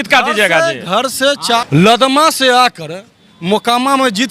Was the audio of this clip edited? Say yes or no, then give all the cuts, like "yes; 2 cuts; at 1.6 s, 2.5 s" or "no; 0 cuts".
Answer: yes; 1 cut; at 1.6 s